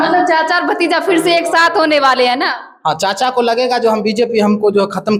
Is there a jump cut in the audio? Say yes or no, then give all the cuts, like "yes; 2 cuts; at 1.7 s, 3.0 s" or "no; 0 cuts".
no; 0 cuts